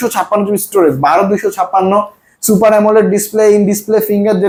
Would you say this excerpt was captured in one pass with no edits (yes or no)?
yes